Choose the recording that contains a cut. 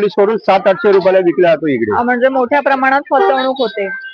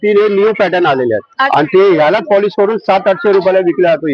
second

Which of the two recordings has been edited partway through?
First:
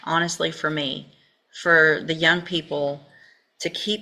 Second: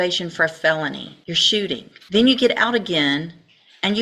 second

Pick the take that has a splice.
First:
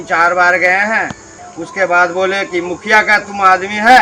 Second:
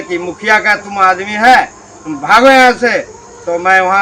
first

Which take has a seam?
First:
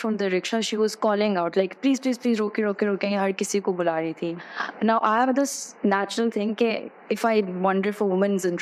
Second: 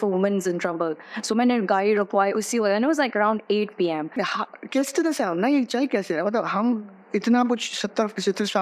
second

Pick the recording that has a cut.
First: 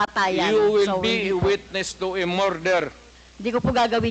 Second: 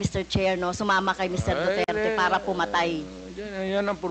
first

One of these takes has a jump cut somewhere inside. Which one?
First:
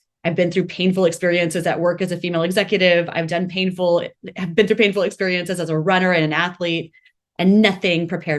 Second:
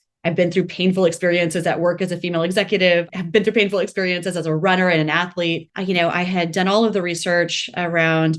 second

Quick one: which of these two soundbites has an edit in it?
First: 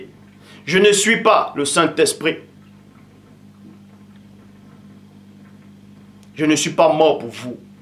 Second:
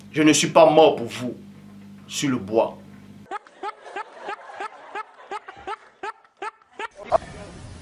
first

